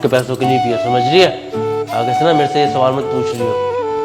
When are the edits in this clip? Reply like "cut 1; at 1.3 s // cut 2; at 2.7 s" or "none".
none